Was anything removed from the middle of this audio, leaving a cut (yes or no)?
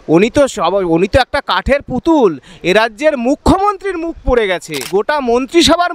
yes